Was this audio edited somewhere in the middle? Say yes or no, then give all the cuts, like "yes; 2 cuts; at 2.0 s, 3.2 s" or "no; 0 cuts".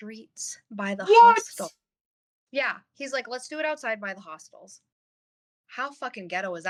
no; 0 cuts